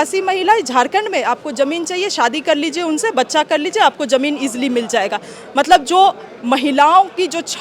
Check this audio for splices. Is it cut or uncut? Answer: uncut